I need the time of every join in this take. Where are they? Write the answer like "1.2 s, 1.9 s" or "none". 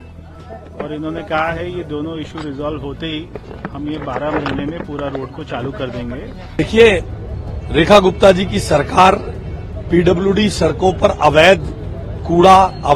6.6 s